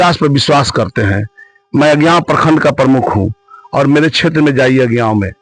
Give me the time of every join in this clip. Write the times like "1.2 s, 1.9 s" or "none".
none